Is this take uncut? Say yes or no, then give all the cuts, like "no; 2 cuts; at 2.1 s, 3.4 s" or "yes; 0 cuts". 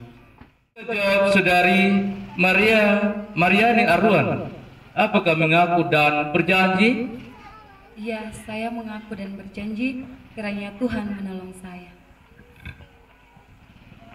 no; 1 cut; at 0.9 s